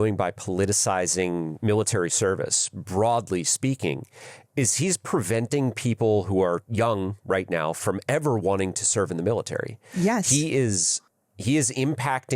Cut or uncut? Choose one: cut